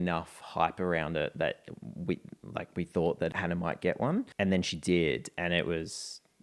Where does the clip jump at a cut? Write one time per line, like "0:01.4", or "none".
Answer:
0:03.3
0:04.3